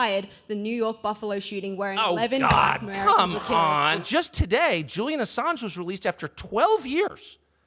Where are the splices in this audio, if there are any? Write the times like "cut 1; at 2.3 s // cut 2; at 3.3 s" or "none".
cut 1; at 4.0 s

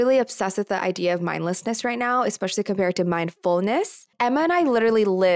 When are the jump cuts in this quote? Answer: cut 1; at 4.1 s

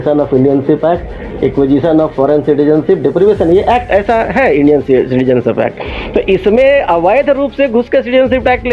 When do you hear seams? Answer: none

